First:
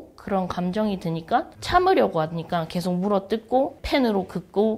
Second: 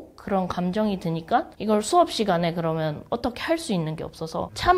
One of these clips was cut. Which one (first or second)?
first